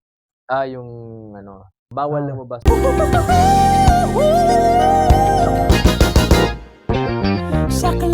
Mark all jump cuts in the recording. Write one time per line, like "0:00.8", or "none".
0:02.5